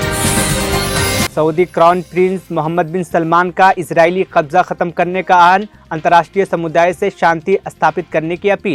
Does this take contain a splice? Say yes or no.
no